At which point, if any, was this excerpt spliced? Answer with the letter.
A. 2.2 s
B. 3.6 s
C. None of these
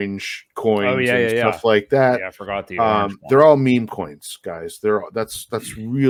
C